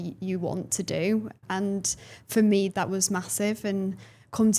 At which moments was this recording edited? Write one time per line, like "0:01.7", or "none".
0:01.4
0:02.7